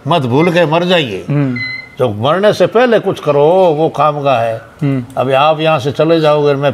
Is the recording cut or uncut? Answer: uncut